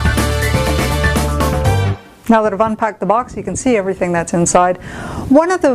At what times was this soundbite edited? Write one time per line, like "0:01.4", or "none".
0:02.0